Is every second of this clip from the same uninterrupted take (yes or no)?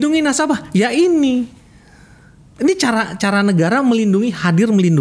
yes